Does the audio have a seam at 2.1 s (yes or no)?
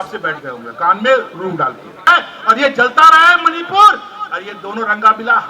yes